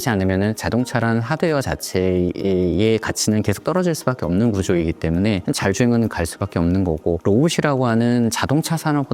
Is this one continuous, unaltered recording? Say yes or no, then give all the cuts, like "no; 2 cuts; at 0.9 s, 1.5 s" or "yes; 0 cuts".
yes; 0 cuts